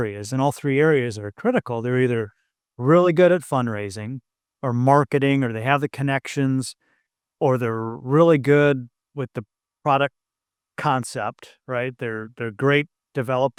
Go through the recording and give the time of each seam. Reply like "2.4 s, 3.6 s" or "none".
none